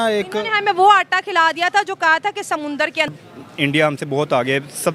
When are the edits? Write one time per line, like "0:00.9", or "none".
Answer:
none